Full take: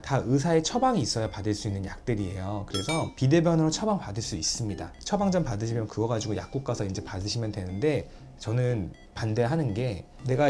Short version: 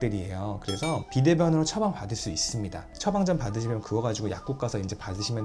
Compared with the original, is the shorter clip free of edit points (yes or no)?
yes